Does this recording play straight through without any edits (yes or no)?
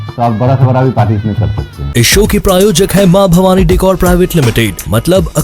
yes